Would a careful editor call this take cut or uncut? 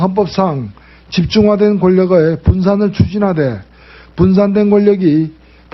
cut